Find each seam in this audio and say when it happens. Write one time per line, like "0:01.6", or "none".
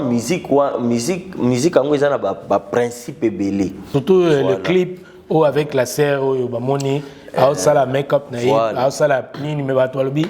0:03.8